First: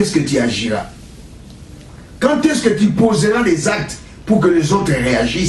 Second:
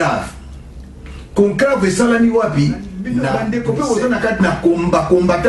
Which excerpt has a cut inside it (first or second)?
second